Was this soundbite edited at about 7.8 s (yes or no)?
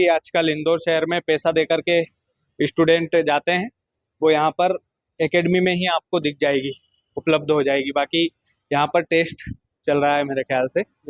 no